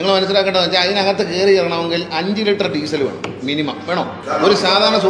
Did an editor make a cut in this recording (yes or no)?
no